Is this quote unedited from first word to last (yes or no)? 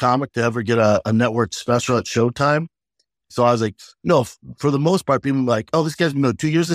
no